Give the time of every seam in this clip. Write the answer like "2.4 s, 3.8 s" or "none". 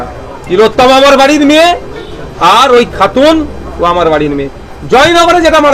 none